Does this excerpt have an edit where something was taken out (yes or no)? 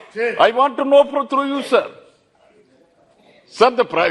no